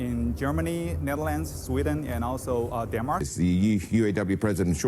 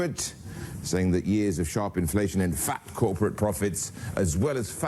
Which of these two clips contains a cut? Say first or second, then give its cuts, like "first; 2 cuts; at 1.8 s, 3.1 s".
first; 1 cut; at 3.2 s